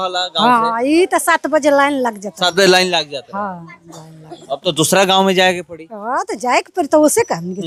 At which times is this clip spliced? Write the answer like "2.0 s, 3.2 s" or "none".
none